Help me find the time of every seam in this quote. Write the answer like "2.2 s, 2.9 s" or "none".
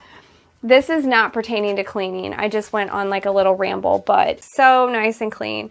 4.4 s